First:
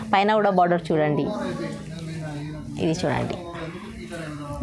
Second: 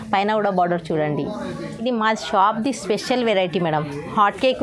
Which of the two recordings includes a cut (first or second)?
second